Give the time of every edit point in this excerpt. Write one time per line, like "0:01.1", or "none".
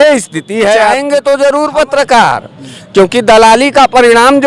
0:01.0